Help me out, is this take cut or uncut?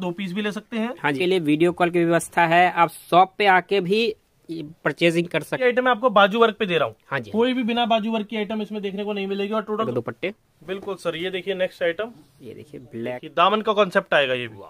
cut